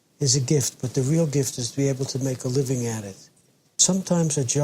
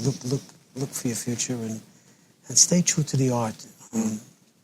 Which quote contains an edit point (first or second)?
first